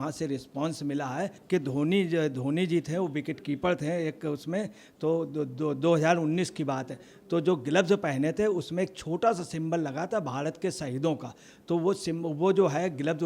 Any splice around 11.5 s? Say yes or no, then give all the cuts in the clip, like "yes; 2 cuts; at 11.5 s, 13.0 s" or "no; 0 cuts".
no; 1 cut; at 1.4 s